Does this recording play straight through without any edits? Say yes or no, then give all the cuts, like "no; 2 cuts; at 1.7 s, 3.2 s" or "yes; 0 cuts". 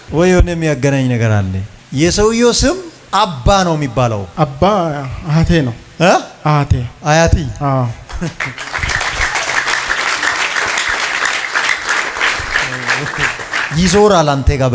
yes; 0 cuts